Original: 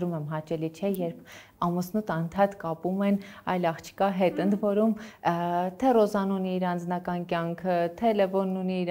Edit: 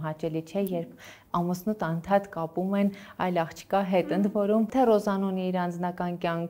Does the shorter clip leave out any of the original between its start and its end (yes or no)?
yes